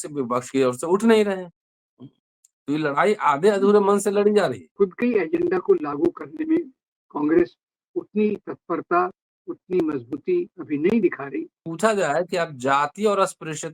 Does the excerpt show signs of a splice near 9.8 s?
no; 2 cuts; at 4.6 s, 11.7 s

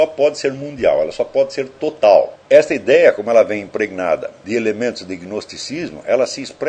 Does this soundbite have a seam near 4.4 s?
yes; 2 cuts; at 2.4 s, 4.4 s

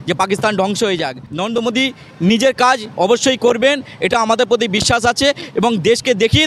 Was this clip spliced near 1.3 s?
yes; 1 cut; at 1.3 s

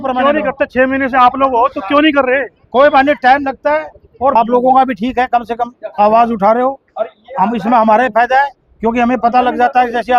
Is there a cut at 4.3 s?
yes; 1 cut; at 4.3 s

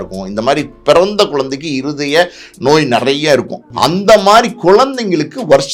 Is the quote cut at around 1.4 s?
no; 1 cut; at 3.6 s

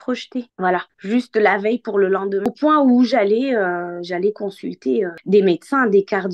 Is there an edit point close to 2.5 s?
yes; 1 cut; at 2.5 s

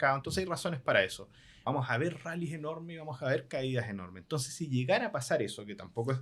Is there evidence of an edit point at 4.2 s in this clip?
no; 1 cut; at 1.5 s

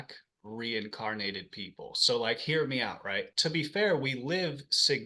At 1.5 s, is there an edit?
no; 1 cut; at 3.3 s

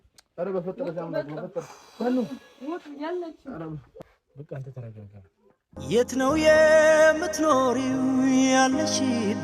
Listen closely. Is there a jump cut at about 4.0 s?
yes; 1 cut; at 4.0 s

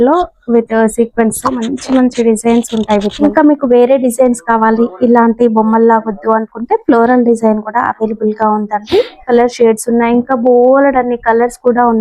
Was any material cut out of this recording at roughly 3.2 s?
yes; 2 cuts; at 3.2 s, 9.2 s

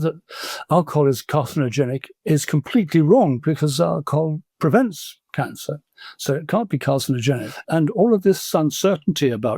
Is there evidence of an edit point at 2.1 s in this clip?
no; 3 cuts; at 3.4 s, 4.5 s, 7.6 s

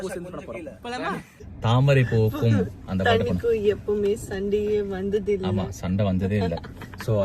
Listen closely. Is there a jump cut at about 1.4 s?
yes; 1 cut; at 1.4 s

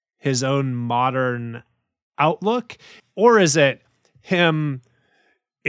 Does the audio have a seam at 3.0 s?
yes; 1 cut; at 3.0 s

